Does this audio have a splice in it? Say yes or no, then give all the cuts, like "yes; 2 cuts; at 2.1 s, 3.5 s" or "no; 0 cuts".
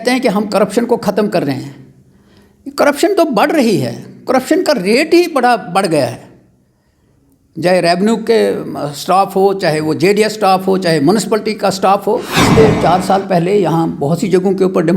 yes; 1 cut; at 12.4 s